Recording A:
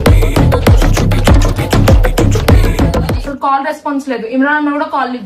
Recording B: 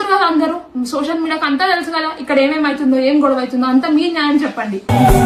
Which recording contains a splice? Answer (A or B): A